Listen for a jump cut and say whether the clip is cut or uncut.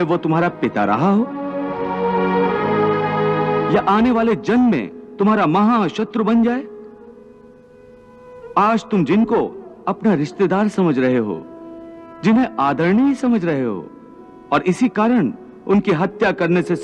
uncut